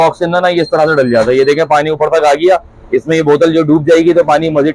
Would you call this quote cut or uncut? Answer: uncut